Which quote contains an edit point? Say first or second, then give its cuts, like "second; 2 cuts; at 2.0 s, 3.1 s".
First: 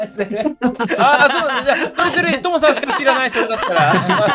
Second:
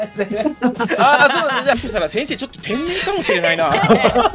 second; 1 cut; at 1.8 s